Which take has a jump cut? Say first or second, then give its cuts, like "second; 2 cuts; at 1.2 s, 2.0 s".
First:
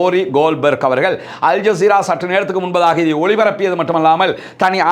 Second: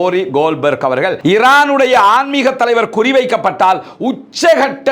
second; 1 cut; at 1.2 s